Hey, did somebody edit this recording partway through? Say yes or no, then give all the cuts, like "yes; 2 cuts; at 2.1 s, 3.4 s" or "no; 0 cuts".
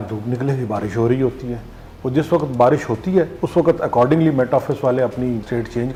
no; 0 cuts